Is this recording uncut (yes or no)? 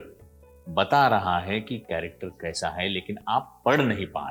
yes